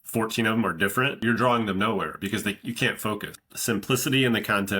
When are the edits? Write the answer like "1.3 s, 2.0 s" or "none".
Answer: 1.2 s, 3.3 s